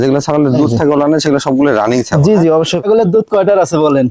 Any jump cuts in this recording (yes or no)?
yes